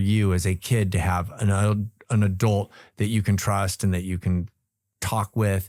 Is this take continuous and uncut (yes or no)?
yes